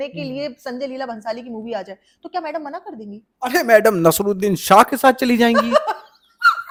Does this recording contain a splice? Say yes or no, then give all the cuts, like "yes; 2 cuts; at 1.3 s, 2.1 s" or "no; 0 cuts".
no; 0 cuts